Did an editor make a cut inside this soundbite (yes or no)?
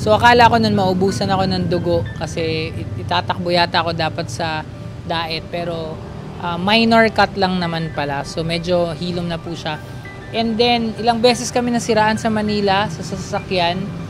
no